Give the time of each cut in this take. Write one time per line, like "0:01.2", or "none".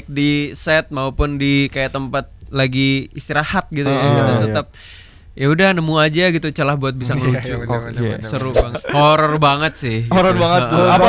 0:08.7